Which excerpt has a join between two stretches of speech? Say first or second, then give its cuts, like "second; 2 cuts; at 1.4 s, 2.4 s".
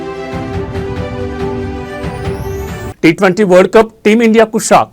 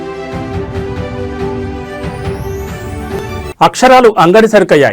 first; 1 cut; at 2.9 s